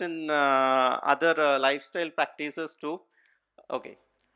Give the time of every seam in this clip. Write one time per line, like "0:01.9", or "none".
none